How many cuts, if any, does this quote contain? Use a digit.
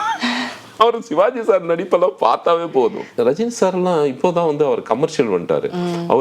1